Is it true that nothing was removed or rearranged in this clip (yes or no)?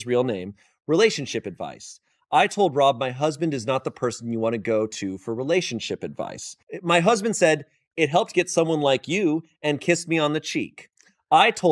no